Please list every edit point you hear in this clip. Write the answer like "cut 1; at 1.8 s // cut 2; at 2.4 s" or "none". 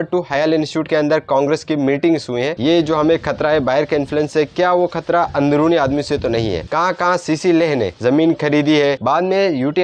cut 1; at 2.6 s // cut 2; at 6.7 s // cut 3; at 9.0 s